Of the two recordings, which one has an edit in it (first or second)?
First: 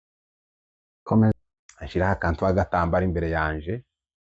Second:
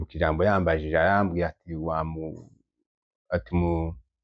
first